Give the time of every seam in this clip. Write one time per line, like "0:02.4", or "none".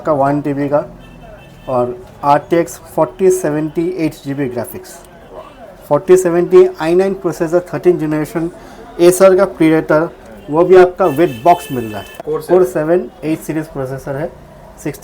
0:12.2